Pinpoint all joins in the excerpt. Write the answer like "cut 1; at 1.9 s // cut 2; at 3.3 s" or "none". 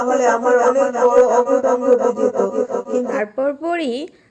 cut 1; at 3.2 s